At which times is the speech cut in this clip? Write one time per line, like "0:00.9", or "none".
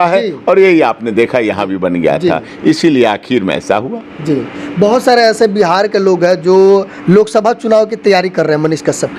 none